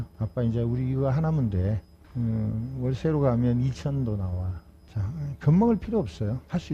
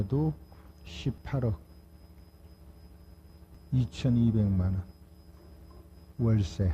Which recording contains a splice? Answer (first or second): second